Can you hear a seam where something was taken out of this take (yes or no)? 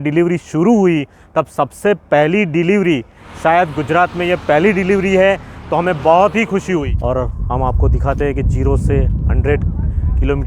yes